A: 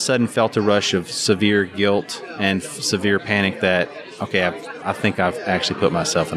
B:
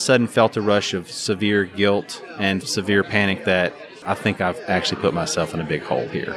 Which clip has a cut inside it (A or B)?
B